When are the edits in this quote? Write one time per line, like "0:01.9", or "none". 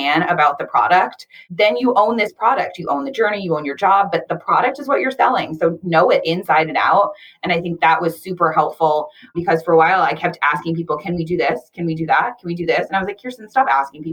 0:01.4